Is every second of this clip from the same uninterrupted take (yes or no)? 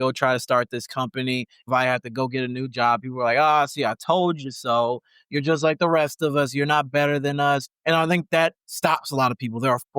no